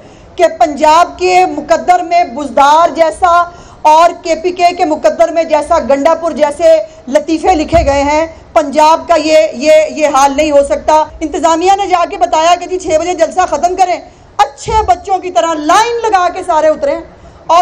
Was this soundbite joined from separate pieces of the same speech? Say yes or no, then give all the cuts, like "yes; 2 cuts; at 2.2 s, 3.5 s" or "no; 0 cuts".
yes; 1 cut; at 11.2 s